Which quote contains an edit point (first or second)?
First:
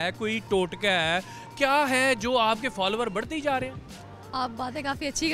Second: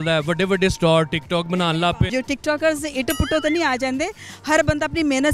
second